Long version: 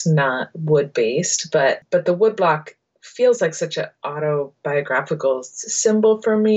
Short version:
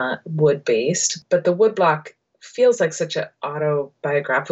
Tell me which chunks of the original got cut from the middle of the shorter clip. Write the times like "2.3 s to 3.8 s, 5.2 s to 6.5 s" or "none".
1.5 s to 1.8 s